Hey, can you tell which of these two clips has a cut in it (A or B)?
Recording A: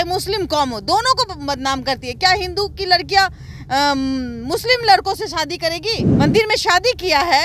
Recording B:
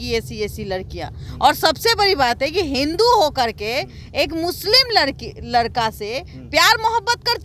A